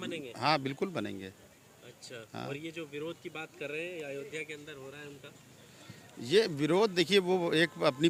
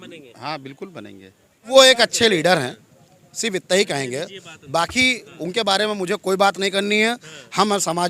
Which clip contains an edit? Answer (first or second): second